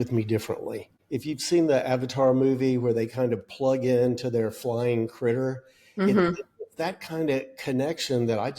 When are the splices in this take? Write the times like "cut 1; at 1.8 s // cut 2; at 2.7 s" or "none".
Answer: cut 1; at 0.9 s